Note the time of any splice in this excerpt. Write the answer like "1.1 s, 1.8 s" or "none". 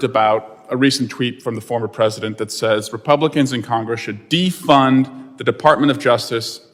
none